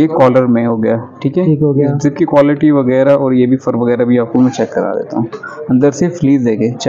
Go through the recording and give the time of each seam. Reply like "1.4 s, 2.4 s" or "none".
none